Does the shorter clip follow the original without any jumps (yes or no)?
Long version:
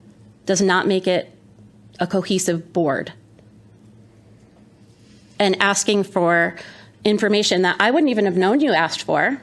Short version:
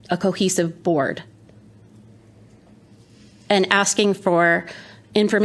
yes